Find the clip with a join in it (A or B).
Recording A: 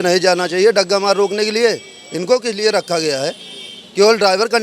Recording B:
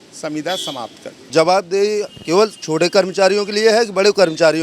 B